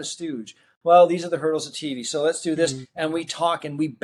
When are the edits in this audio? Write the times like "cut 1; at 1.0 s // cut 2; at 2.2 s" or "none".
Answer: none